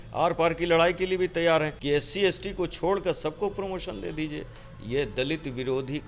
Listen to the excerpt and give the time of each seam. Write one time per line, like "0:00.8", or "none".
0:01.7

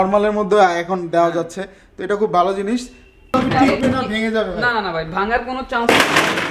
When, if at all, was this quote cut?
0:03.3

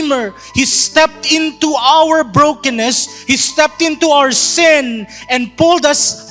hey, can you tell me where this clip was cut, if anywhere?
none

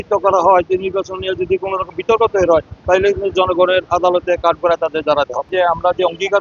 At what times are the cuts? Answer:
0:05.5

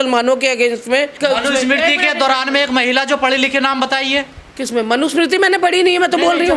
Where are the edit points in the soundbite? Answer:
0:01.1

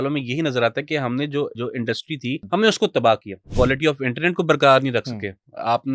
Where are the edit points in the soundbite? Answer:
0:01.9
0:03.5

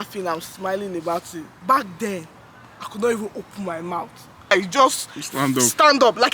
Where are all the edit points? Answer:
0:04.5

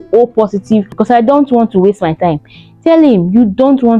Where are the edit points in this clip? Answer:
0:00.9

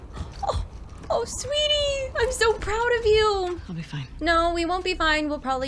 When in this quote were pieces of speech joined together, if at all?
0:03.6

